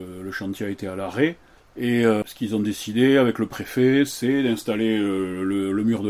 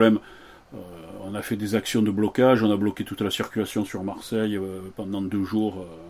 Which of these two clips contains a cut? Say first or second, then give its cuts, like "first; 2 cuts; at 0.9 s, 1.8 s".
first; 1 cut; at 2.2 s